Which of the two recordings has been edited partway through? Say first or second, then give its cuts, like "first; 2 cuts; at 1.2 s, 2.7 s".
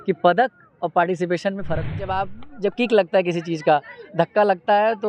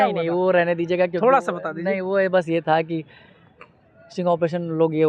first; 1 cut; at 2.0 s